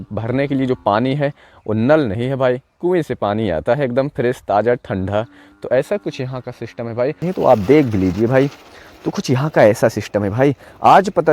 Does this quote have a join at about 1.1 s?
no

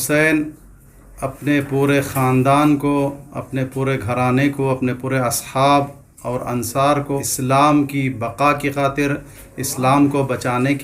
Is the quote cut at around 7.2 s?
yes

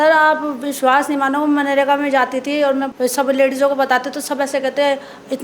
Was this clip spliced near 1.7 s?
no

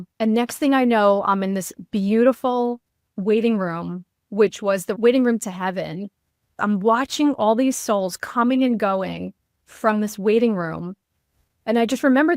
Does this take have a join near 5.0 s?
yes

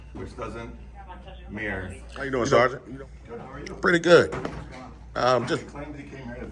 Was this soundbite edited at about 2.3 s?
yes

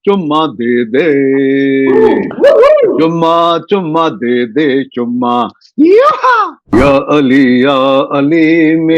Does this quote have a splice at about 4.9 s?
no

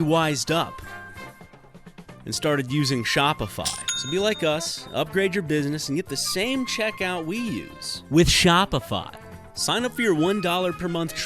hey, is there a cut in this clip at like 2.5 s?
no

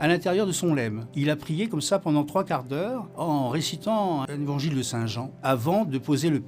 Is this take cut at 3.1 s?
no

